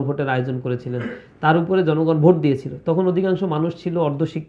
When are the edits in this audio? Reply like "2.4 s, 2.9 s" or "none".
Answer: 1.2 s